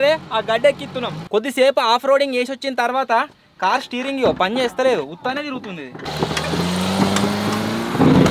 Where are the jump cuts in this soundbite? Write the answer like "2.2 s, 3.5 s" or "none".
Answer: 1.3 s, 6.0 s